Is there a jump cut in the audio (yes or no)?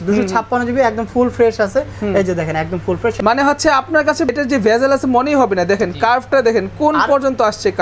yes